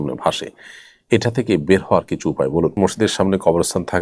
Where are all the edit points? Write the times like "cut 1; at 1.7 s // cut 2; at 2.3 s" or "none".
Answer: cut 1; at 2.8 s